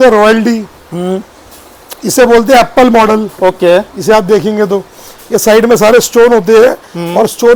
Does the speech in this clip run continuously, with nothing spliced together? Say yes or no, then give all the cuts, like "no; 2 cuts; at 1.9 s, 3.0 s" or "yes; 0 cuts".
yes; 0 cuts